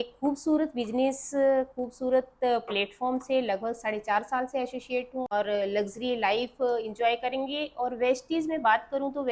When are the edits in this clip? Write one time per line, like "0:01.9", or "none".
0:05.3